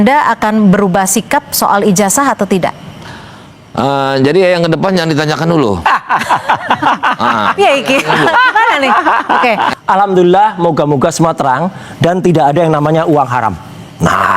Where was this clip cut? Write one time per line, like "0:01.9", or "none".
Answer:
0:09.7

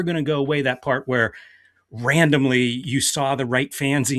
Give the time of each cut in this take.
none

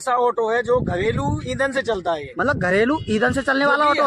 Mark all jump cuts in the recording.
none

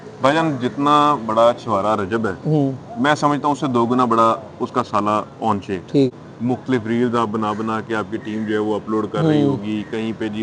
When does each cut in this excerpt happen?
0:05.8

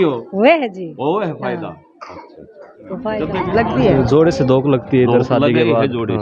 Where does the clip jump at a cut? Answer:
0:03.4

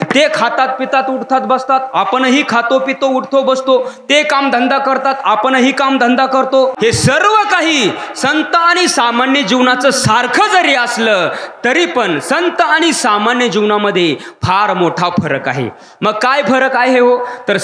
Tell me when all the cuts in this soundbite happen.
0:06.8

